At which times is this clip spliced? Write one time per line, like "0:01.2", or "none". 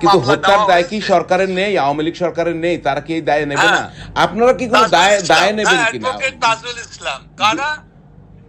0:03.9